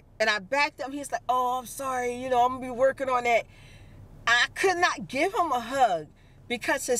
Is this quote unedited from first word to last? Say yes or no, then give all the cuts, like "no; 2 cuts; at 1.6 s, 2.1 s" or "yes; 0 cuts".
yes; 0 cuts